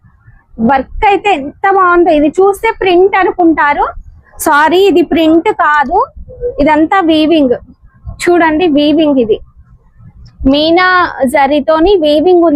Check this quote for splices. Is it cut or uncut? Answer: uncut